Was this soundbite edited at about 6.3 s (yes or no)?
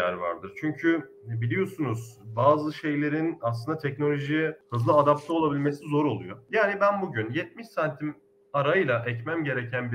yes